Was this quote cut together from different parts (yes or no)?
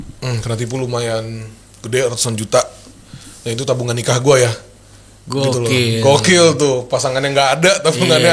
no